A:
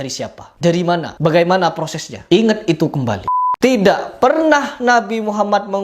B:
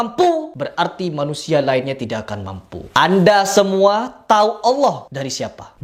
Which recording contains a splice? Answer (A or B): A